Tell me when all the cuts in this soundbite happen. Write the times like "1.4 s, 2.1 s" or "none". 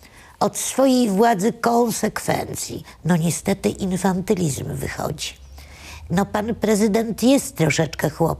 2.9 s

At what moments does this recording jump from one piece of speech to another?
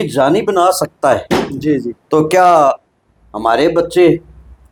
none

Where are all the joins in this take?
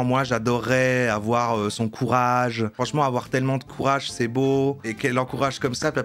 2.7 s, 4.8 s

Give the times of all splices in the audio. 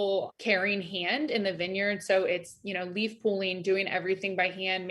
none

